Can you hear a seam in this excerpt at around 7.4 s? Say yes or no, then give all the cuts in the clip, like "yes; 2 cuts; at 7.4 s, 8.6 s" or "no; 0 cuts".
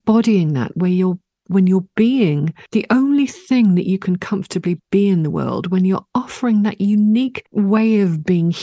yes; 2 cuts; at 2.5 s, 7.4 s